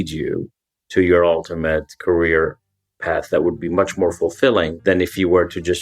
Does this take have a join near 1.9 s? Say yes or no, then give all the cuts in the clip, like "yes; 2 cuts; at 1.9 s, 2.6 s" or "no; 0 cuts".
no; 1 cut; at 4.7 s